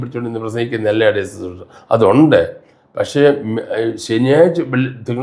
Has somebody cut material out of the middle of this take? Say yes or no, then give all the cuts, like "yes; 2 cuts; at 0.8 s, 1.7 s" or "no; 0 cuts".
no; 0 cuts